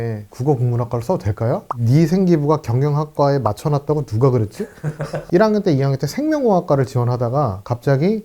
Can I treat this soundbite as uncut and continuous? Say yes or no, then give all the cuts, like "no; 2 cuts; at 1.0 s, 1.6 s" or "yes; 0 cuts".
no; 2 cuts; at 1.7 s, 5.2 s